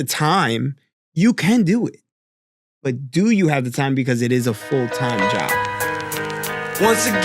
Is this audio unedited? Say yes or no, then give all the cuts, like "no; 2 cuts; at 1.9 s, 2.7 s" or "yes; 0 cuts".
no; 1 cut; at 5.0 s